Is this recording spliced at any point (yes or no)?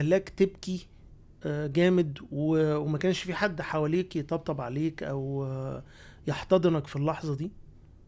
no